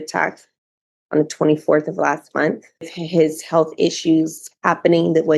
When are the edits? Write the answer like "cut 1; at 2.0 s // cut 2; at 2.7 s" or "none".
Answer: cut 1; at 2.9 s